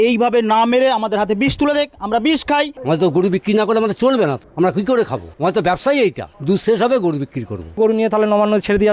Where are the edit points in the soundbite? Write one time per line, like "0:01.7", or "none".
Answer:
0:02.8
0:04.4
0:05.2
0:06.3
0:07.8